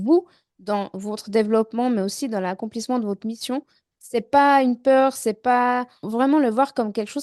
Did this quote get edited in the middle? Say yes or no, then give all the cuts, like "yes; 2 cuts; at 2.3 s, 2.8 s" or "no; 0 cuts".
yes; 2 cuts; at 3.8 s, 6.0 s